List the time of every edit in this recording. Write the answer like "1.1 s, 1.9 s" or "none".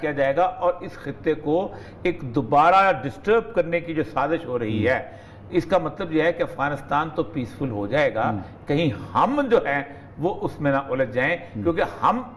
none